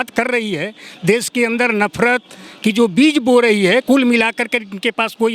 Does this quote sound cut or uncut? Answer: uncut